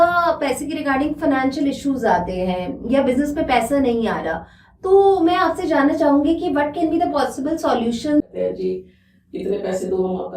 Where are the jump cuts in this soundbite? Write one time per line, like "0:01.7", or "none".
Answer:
0:08.3